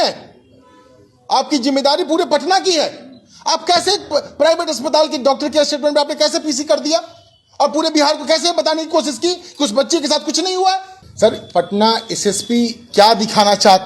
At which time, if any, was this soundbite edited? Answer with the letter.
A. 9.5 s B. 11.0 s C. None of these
B